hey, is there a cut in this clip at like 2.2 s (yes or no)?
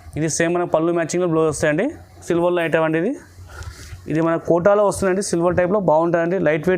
yes